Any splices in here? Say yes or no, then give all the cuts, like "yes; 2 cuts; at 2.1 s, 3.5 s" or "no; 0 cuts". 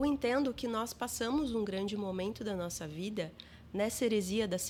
no; 0 cuts